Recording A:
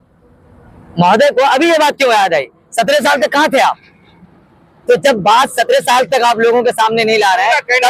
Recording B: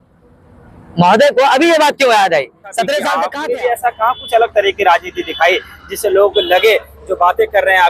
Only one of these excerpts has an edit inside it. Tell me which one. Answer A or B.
B